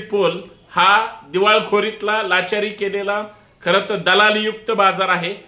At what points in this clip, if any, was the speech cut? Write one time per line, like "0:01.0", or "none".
none